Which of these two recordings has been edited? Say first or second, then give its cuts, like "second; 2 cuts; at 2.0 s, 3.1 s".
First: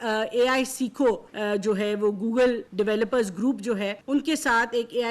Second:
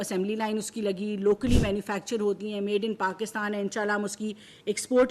first; 3 cuts; at 1.3 s, 2.6 s, 4.0 s